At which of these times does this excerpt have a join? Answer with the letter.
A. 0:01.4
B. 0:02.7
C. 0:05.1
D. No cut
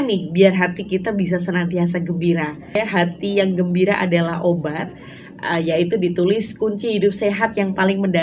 B